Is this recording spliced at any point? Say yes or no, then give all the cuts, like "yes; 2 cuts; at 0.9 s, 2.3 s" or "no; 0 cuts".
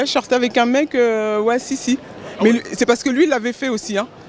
no; 0 cuts